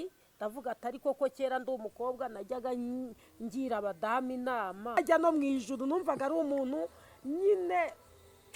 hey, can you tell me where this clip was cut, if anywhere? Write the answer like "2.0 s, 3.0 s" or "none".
5.0 s